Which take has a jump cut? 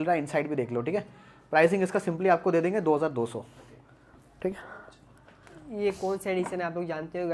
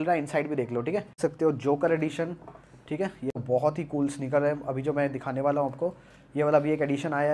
second; 2 cuts; at 1.2 s, 3.4 s

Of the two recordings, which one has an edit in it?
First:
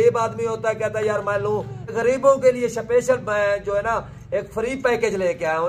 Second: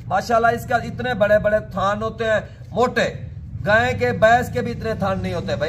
first; 1 cut; at 1.9 s

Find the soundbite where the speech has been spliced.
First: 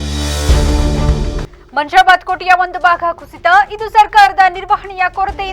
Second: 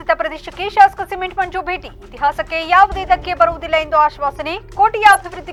first; 1 cut; at 1.4 s

